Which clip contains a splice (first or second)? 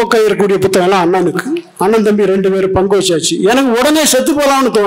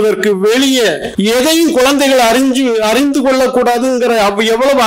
second